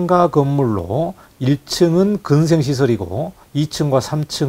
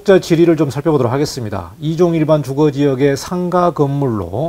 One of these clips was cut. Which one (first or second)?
first